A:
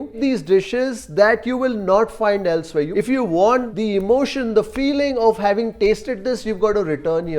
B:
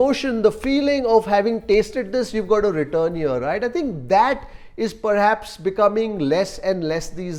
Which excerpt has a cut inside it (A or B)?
A